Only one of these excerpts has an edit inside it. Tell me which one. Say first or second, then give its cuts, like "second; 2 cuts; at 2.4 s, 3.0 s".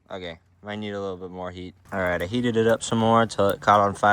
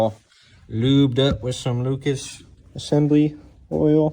first; 1 cut; at 1.8 s